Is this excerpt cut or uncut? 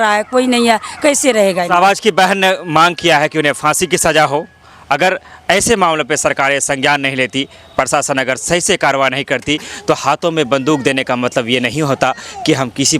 uncut